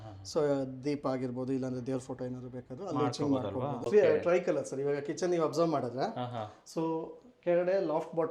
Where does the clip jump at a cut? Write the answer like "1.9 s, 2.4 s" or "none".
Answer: 3.8 s